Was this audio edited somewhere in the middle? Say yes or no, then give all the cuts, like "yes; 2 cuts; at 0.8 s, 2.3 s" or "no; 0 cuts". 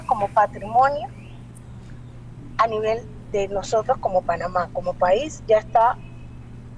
no; 0 cuts